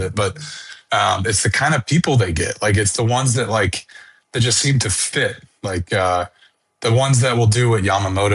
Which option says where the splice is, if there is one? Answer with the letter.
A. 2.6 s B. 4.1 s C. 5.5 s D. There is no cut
D